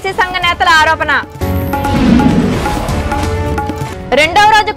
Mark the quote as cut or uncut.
uncut